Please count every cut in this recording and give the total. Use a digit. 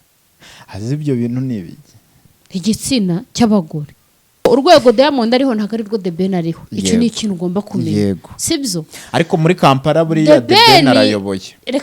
1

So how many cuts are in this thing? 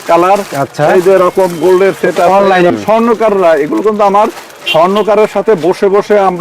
1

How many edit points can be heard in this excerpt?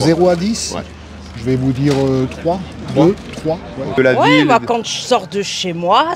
1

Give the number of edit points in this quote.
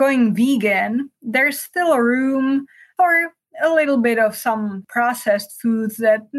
2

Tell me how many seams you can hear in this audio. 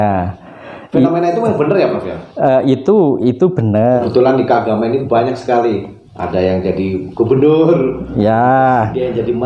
1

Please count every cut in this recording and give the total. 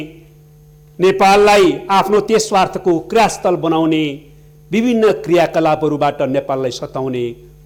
0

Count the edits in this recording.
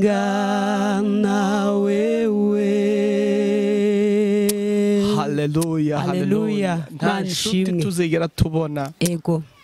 0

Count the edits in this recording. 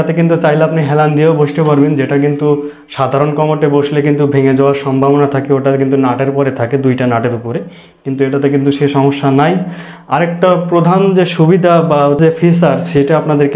1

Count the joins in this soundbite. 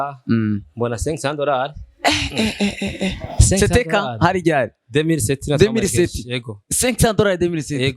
0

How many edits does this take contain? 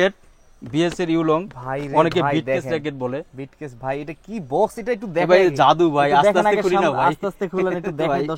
0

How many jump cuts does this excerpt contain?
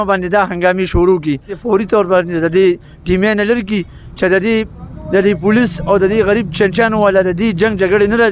1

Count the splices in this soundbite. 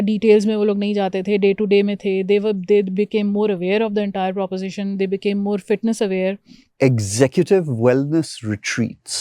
1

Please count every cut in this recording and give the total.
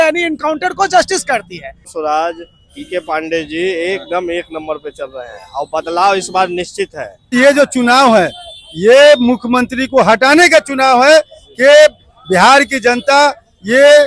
2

